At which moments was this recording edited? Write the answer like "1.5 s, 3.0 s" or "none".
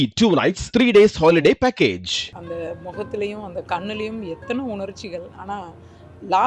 2.3 s